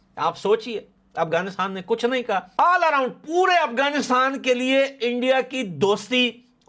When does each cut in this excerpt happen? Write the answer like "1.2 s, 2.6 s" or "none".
2.5 s